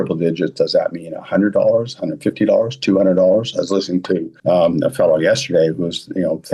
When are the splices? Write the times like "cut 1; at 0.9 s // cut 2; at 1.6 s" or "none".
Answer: cut 1; at 4.3 s